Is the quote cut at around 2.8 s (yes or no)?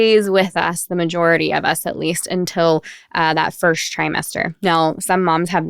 no